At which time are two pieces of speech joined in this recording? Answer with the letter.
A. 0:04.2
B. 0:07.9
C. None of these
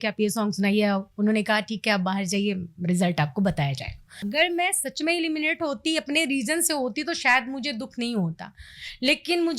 A